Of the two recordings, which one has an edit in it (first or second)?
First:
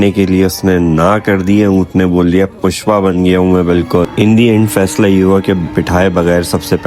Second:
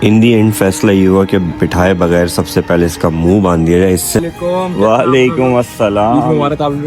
second